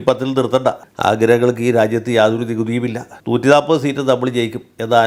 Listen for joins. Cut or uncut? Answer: uncut